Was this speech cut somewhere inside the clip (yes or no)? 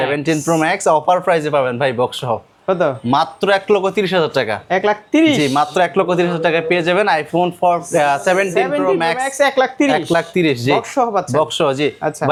no